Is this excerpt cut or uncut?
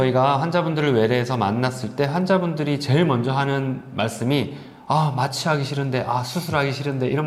uncut